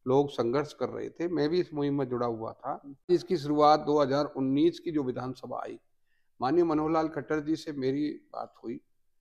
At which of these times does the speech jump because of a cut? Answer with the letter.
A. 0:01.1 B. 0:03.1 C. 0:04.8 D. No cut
B